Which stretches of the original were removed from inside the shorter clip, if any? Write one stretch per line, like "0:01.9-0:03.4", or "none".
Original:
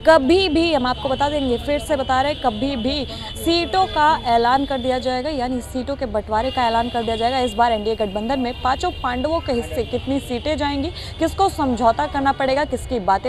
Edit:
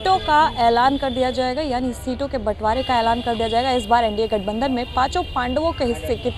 none

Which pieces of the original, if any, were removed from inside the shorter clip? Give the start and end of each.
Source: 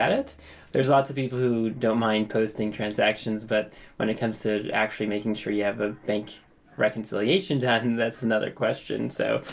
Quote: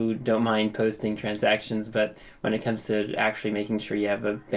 none

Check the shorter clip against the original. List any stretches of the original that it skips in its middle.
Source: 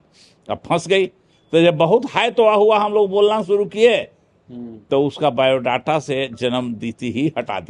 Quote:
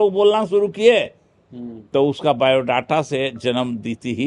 none

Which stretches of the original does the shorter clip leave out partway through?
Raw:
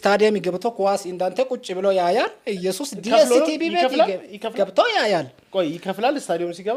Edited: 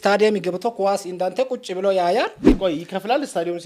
0:02.5-0:05.4

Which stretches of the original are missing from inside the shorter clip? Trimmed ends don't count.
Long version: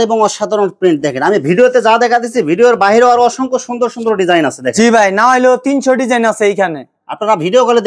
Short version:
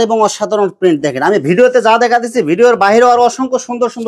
none

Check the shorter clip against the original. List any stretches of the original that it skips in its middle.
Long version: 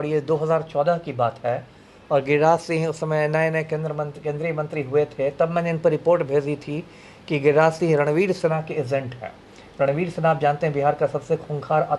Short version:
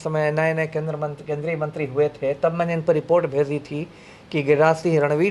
none

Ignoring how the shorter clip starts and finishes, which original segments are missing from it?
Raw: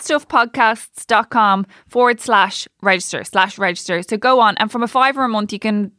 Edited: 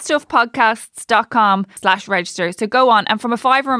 0:01.7-0:03.2

